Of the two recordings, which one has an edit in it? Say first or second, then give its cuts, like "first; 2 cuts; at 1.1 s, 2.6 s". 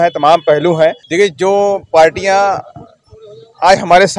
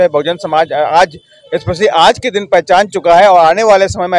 first; 1 cut; at 1.0 s